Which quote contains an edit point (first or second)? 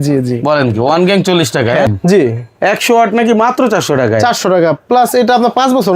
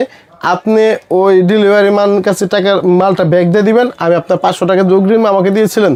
first